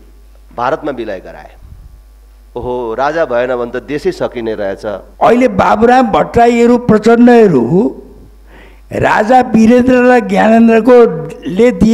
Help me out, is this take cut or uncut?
cut